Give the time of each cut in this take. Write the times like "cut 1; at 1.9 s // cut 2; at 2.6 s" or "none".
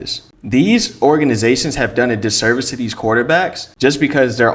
cut 1; at 3.6 s